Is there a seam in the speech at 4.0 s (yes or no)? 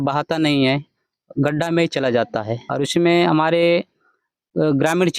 no